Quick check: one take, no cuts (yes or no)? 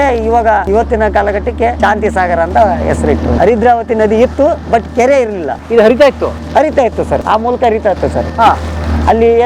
no